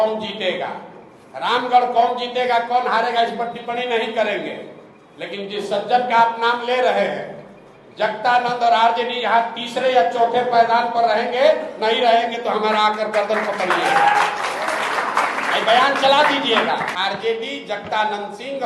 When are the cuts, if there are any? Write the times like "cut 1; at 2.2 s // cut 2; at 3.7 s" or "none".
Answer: cut 1; at 16.9 s